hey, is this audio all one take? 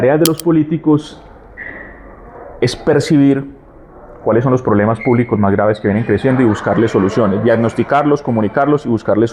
yes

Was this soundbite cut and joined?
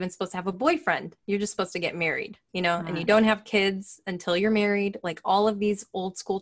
yes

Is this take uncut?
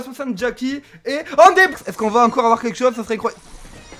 no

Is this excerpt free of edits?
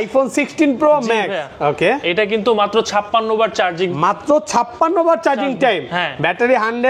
yes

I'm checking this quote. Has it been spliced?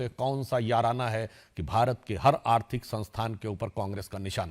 no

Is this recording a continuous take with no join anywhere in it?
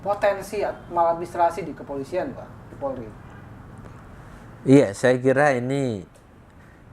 yes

